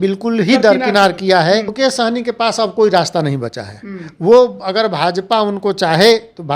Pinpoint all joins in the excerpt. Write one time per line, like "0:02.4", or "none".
0:01.7